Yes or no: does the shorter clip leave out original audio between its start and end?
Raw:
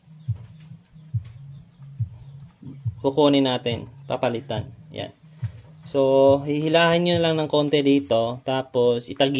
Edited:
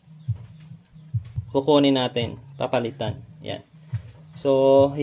yes